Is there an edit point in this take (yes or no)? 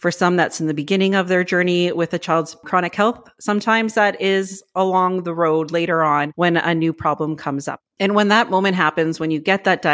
no